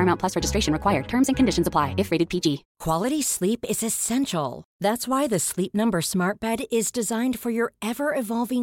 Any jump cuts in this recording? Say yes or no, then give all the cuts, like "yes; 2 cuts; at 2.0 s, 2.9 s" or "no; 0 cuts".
yes; 1 cut; at 2.7 s